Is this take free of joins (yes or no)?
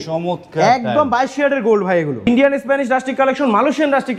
no